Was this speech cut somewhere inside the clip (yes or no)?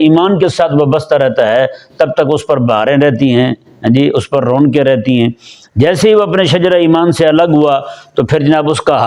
no